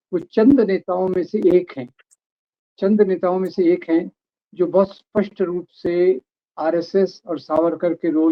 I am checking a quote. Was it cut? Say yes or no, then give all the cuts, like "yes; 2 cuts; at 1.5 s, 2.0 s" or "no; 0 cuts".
no; 0 cuts